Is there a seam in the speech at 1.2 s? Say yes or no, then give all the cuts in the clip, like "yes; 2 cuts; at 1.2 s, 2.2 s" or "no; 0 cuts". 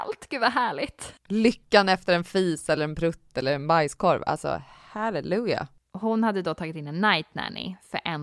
yes; 2 cuts; at 1.2 s, 5.7 s